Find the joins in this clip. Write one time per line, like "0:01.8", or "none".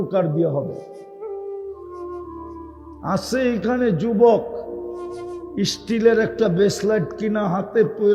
0:01.4
0:03.0